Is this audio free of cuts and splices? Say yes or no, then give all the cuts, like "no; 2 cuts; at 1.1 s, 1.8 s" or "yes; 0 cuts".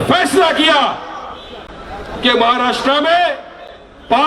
yes; 0 cuts